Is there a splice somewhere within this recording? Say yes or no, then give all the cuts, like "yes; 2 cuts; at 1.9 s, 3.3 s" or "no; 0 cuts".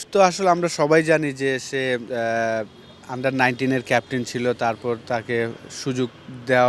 no; 0 cuts